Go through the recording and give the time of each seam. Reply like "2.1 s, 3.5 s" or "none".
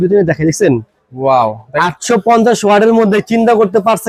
none